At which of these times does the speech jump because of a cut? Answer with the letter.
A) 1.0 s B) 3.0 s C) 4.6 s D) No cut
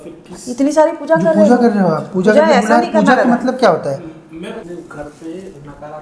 C